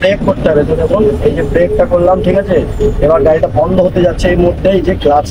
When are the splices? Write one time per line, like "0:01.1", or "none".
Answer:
none